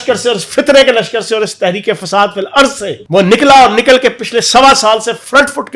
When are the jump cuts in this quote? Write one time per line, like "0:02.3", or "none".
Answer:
0:03.2